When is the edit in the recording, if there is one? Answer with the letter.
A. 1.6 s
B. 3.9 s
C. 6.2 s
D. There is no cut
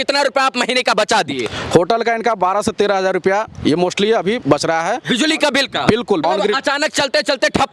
C